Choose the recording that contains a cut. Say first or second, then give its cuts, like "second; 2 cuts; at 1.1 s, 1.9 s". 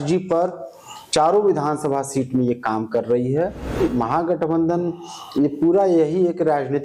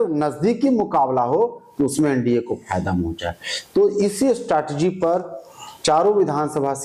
first; 1 cut; at 3.8 s